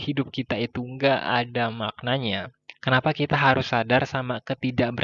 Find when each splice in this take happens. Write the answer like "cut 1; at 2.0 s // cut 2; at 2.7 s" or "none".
none